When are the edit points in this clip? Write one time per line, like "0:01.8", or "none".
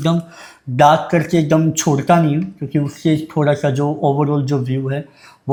none